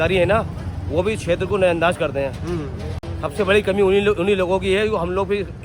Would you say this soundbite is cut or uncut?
uncut